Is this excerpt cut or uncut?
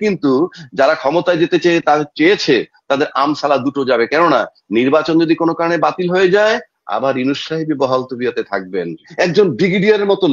cut